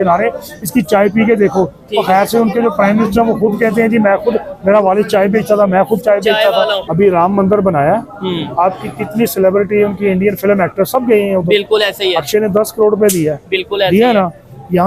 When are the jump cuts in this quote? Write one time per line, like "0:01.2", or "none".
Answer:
0:06.8